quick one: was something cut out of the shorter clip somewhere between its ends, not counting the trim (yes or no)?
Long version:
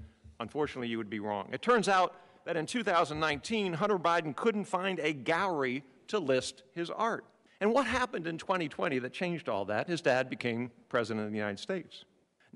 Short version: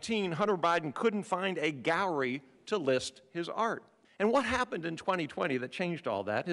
no